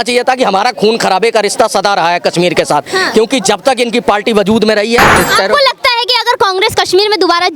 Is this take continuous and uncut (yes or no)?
no